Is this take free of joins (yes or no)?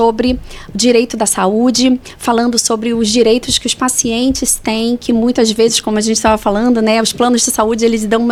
yes